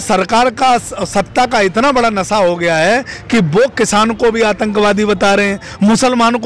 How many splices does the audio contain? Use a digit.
0